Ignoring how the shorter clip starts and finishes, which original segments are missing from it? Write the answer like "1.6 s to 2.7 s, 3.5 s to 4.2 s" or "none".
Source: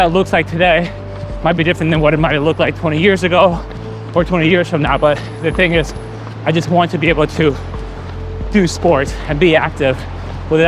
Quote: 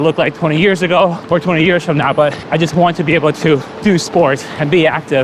3.6 s to 4.0 s, 5.3 s to 6.3 s, 7.7 s to 8.4 s